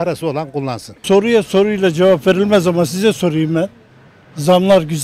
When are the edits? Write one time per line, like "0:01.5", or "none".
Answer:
0:00.9